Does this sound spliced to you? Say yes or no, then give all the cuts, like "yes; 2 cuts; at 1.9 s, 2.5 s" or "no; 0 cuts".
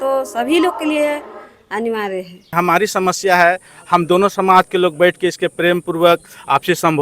yes; 1 cut; at 2.5 s